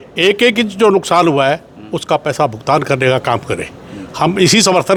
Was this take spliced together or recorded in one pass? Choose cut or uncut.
uncut